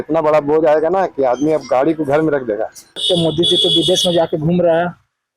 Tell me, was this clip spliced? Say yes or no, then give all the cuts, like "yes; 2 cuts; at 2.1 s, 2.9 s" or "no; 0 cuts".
yes; 1 cut; at 3.0 s